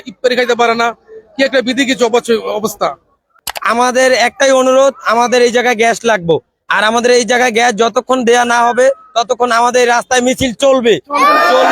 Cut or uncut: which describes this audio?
cut